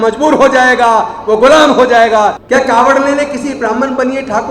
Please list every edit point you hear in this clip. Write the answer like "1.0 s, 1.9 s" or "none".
2.4 s